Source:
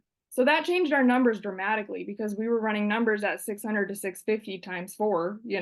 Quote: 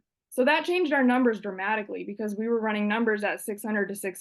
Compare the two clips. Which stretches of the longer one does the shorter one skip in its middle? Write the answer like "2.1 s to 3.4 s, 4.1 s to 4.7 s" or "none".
none

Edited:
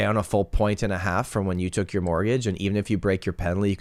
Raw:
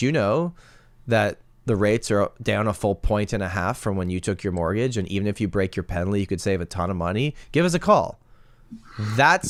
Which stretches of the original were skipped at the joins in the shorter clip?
none

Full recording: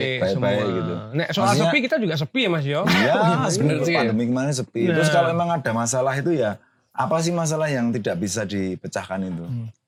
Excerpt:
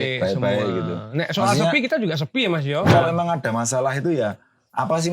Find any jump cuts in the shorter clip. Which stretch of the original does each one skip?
2.9 s to 5.1 s

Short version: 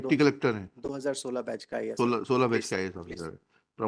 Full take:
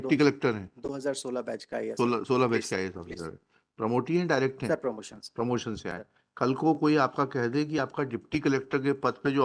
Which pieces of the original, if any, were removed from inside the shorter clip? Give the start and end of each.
none

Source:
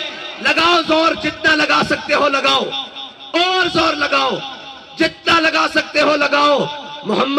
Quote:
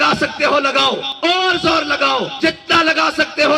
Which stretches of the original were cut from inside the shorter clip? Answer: 2.8 s to 3.2 s, 4.4 s to 4.9 s

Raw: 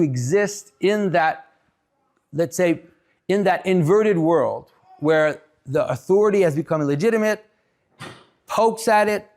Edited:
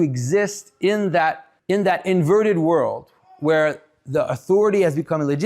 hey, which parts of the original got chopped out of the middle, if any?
1.5 s to 3.1 s

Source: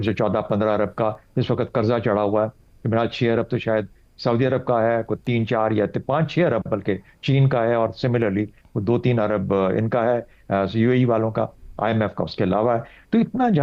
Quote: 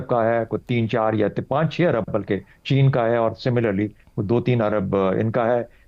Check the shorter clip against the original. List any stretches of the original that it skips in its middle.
none

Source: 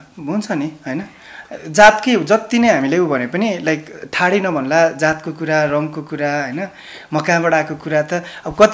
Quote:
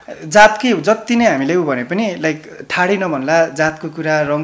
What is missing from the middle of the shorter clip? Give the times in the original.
none

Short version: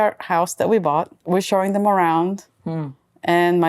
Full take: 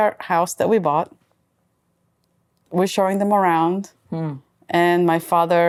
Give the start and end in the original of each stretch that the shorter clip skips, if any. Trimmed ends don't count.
1.2 s to 2.6 s

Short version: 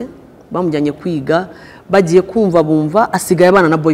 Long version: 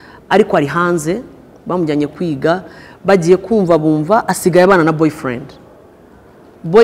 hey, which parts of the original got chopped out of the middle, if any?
none

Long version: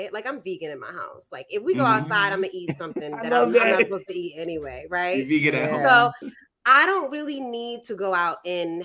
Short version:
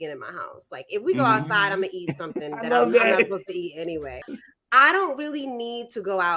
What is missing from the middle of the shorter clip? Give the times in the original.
4.9 s to 6.2 s

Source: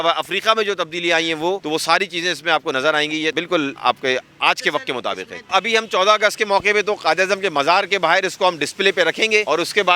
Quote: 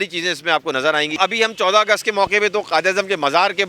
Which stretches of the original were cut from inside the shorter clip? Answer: 3.1 s to 5.5 s

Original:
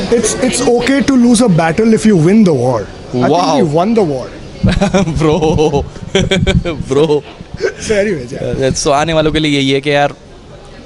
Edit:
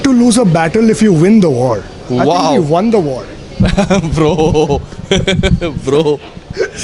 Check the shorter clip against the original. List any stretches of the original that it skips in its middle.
none

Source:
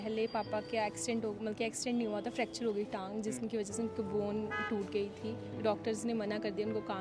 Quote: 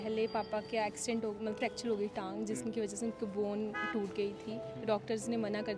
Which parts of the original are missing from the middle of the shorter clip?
1.6 s to 2.3 s

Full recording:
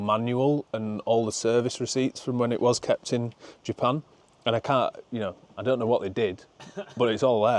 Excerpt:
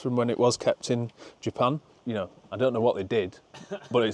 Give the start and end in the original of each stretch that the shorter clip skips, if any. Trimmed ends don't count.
4.2 s to 5.0 s

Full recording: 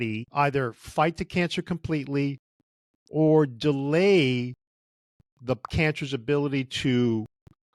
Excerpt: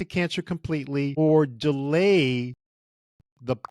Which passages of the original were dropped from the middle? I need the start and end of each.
2.3 s to 3.1 s

